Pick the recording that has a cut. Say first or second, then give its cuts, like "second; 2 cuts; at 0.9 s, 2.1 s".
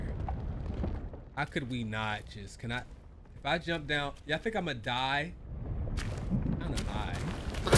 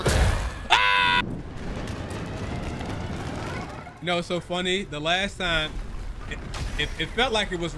second; 1 cut; at 1.2 s